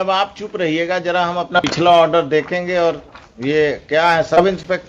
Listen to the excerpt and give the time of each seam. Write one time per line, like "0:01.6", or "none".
0:01.6